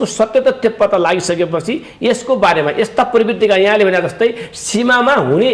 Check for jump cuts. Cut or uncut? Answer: uncut